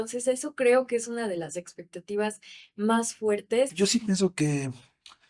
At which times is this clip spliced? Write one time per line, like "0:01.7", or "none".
0:03.7